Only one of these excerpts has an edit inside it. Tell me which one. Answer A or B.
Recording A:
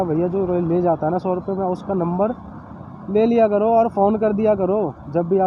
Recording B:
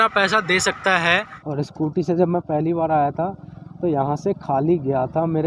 B